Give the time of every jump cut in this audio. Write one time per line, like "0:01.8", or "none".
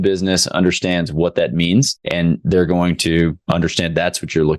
0:02.0
0:03.4